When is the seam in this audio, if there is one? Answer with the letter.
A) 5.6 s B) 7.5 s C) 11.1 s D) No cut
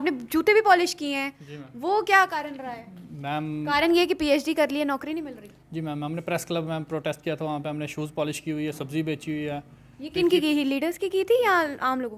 D